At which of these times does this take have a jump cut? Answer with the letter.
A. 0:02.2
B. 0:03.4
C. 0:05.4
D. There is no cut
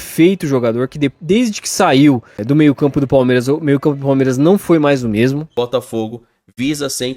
C